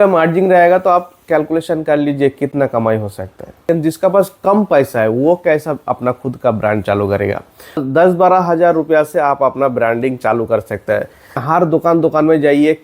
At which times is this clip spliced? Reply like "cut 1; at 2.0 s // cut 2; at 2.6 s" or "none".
cut 1; at 3.6 s // cut 2; at 7.8 s // cut 3; at 11.4 s